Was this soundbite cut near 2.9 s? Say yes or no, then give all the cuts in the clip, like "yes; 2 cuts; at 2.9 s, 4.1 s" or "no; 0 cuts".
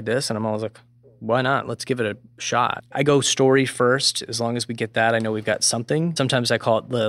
yes; 2 cuts; at 2.9 s, 6.1 s